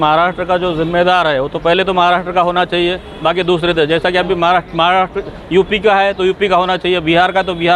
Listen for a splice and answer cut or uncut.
uncut